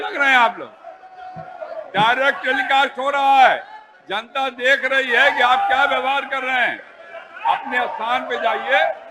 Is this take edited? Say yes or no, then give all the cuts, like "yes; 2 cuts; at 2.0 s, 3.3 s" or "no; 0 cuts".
no; 0 cuts